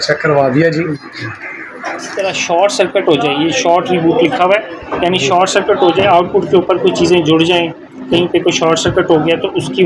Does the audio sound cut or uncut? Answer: cut